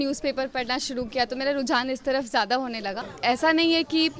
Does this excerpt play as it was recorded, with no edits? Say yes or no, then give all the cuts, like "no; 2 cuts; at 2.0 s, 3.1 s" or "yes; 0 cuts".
no; 1 cut; at 3.1 s